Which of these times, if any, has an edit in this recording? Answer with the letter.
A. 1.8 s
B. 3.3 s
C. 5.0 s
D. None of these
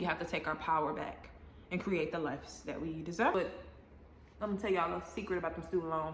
B